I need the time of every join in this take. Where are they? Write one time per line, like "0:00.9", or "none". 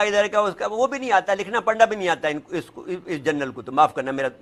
none